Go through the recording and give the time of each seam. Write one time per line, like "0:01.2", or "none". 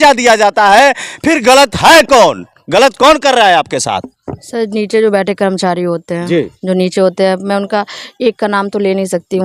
none